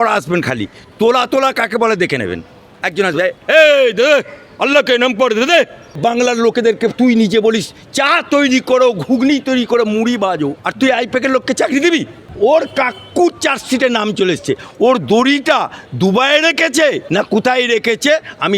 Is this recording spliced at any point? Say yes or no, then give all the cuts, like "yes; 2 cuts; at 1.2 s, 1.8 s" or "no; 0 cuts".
yes; 4 cuts; at 6.0 s, 10.6 s, 12.3 s, 17.0 s